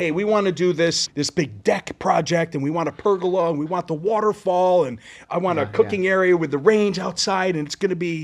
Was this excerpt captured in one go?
no; 1 cut; at 1.0 s

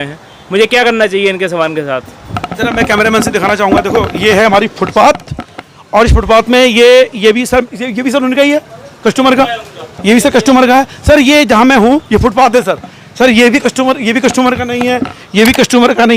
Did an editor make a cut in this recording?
no; 0 cuts

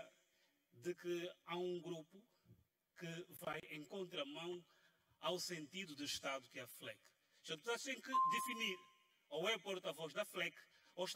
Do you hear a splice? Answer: no; 0 cuts

